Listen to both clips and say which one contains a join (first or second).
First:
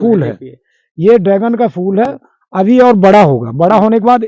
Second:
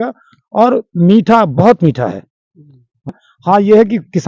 second